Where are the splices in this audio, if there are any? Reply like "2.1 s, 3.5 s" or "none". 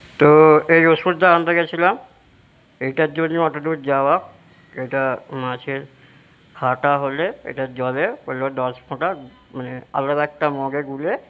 none